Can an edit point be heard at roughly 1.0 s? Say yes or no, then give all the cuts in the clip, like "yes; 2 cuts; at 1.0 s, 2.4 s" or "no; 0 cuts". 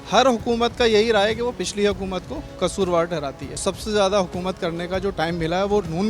no; 2 cuts; at 2.4 s, 3.7 s